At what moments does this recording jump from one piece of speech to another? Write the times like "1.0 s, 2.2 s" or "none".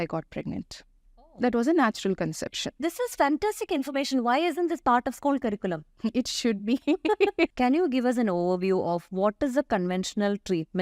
2.7 s, 7.5 s